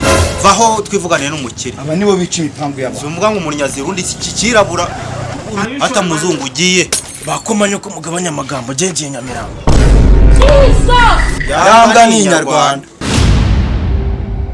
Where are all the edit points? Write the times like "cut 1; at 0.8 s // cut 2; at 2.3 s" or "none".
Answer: cut 1; at 12.9 s